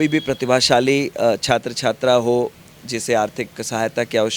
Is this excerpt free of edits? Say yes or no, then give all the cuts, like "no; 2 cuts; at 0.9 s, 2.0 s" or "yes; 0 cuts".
yes; 0 cuts